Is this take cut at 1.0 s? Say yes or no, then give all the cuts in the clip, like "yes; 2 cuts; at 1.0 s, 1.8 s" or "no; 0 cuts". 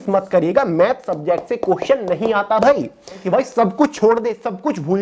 no; 1 cut; at 3.2 s